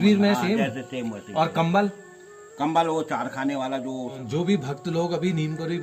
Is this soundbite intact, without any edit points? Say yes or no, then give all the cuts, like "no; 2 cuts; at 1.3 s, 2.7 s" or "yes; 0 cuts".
no; 1 cut; at 4.2 s